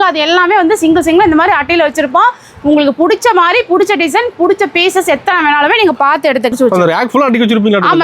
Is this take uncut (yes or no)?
no